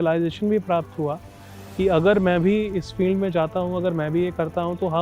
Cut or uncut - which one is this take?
uncut